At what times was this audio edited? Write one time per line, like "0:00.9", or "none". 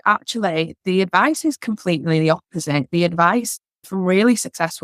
none